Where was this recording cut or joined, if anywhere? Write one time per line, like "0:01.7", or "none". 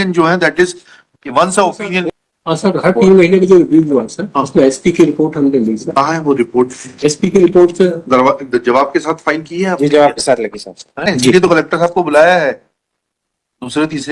0:02.1
0:11.1